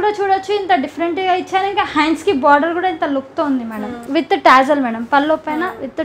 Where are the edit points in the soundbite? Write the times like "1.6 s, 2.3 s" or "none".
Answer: 3.9 s

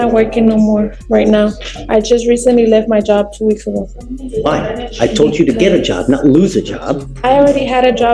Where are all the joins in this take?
none

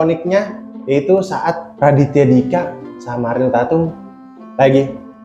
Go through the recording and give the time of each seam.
1.7 s

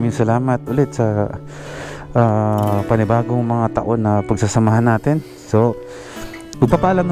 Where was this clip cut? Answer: none

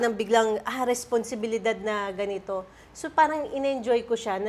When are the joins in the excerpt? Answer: none

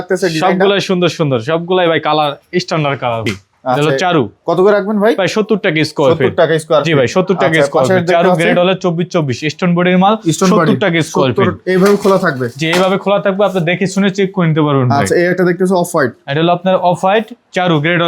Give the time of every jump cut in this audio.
3.3 s

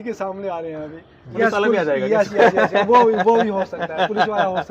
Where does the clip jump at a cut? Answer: 1.4 s

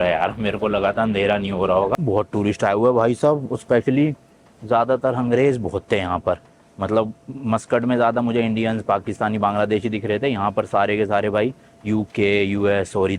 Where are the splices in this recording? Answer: 2.0 s

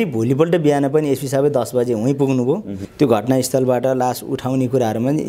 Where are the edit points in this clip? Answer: 2.8 s

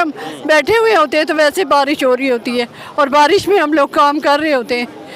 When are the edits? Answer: none

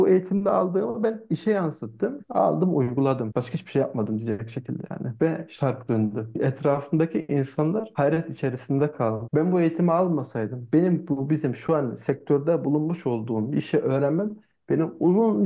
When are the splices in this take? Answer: 2.2 s, 3.2 s, 6.3 s, 9.2 s

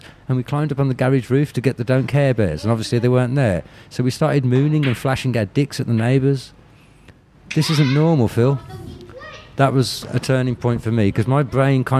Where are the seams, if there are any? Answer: none

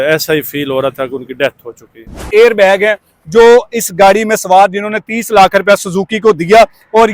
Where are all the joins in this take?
2.3 s

